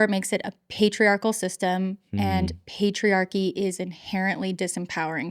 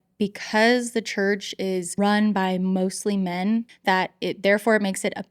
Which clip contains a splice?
second; 2 cuts; at 1.9 s, 3.7 s

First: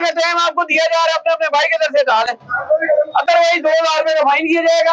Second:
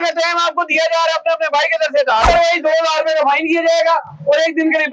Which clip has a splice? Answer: second; 1 cut; at 2.2 s

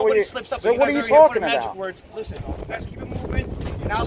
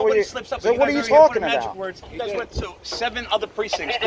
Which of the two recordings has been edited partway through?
second; 1 cut; at 2.0 s

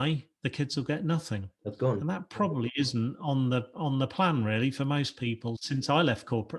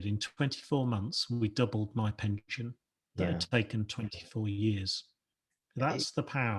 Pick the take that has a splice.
first; 1 cut; at 5.6 s

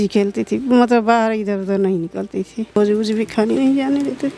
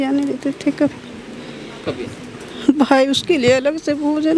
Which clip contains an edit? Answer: first; 1 cut; at 2.8 s

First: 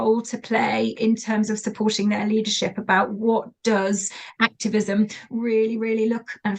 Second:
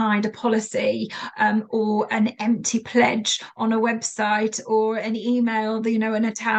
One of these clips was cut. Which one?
first; 1 cut; at 4.2 s

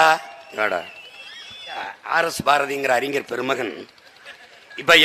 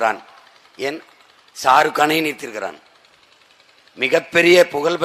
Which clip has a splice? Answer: first; 1 cut; at 1.9 s

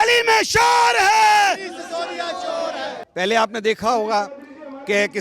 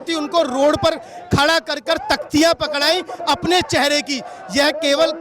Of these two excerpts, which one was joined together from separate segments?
first; 1 cut; at 3.0 s

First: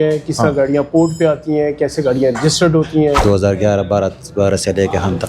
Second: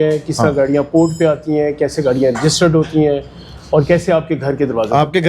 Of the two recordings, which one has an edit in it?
first; 1 cut; at 3.2 s

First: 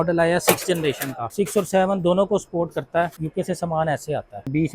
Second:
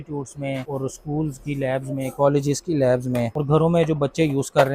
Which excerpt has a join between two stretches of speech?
first; 1 cut; at 3.1 s

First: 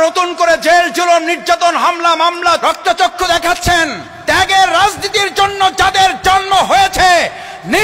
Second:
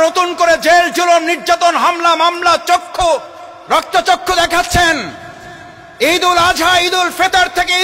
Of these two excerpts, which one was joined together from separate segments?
first; 2 cuts; at 2.6 s, 4.1 s

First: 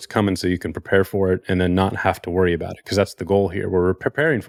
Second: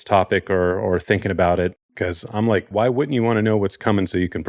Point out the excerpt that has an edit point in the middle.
second; 1 cut; at 2.7 s

